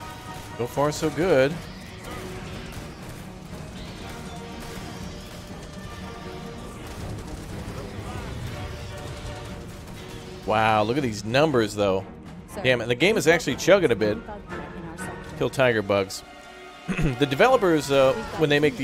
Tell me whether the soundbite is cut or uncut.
uncut